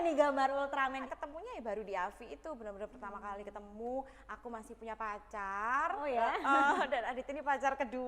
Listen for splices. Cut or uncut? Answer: cut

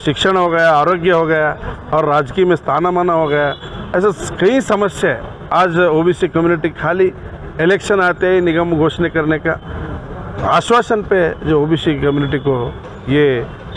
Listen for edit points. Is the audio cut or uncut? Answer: uncut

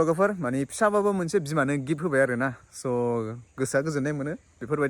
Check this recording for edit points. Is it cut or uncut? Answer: uncut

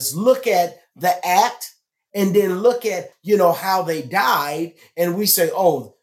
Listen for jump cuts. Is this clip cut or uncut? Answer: cut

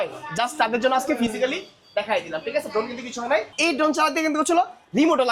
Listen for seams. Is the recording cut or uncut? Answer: cut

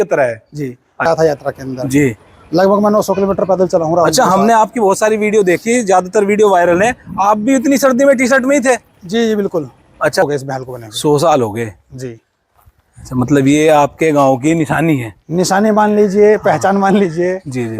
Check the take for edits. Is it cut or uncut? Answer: cut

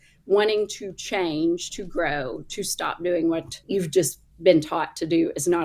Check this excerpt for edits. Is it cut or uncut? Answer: cut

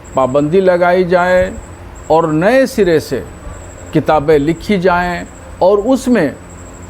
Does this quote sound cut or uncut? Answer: uncut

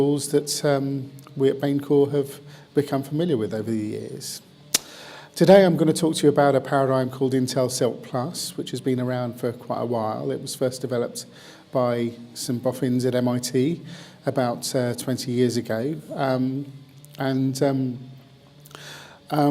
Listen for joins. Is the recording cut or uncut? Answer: cut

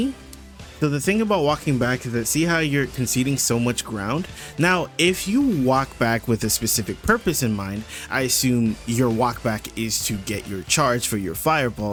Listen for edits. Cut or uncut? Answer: uncut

